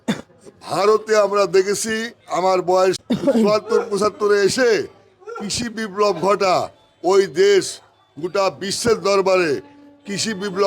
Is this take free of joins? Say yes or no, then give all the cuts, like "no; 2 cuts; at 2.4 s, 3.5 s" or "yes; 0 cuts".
no; 1 cut; at 3.0 s